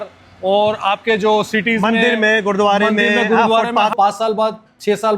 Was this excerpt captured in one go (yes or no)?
no